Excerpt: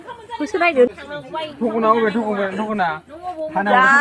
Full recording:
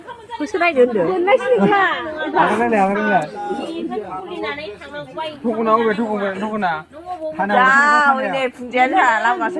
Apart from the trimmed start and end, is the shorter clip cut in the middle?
yes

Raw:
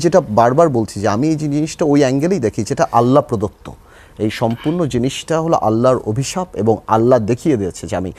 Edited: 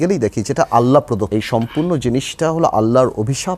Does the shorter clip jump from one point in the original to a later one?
yes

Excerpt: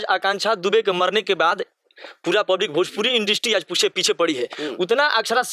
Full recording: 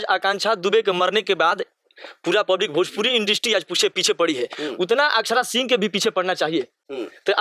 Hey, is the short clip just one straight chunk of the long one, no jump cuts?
yes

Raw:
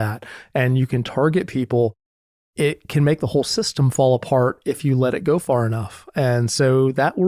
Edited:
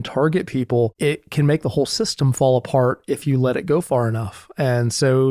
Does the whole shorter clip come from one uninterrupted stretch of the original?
no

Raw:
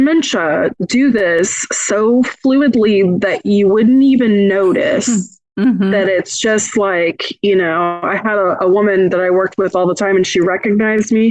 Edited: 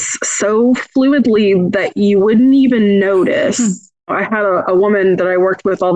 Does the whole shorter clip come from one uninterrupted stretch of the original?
no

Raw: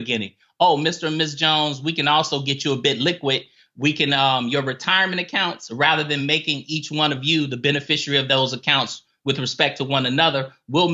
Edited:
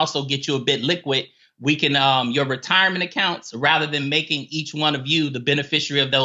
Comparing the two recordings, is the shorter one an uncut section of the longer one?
yes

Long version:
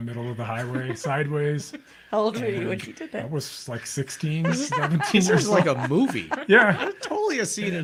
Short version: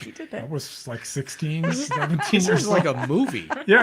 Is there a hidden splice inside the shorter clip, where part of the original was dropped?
no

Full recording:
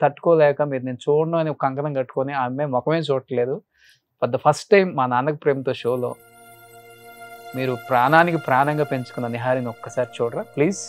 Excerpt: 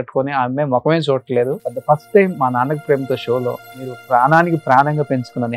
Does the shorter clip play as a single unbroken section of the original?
no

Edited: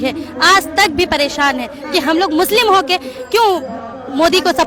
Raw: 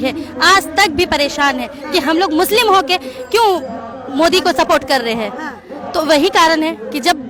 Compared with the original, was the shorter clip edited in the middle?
no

